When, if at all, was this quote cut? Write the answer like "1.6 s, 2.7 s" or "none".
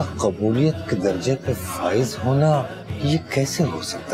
2.8 s

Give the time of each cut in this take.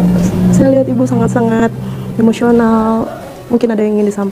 none

